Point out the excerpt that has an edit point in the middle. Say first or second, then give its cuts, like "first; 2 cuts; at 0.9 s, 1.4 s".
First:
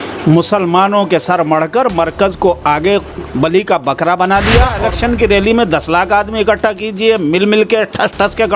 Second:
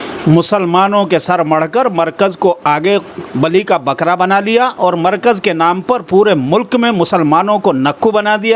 first; 1 cut; at 4.8 s